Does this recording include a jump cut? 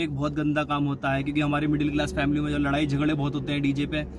no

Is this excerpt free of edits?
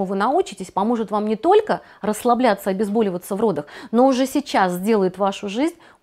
yes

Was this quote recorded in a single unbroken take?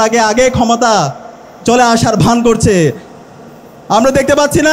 yes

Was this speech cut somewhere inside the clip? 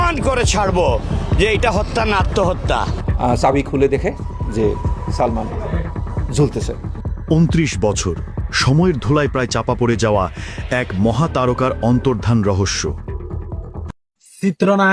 yes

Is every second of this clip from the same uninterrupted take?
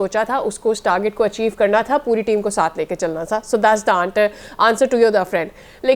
yes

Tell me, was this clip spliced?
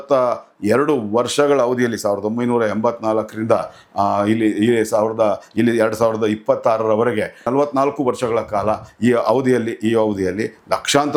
no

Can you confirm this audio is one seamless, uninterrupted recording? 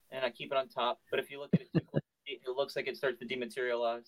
no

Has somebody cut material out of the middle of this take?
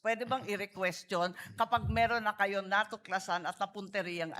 no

